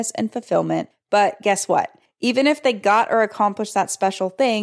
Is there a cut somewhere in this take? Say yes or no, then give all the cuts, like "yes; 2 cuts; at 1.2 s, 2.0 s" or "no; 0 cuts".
yes; 2 cuts; at 0.9 s, 2.0 s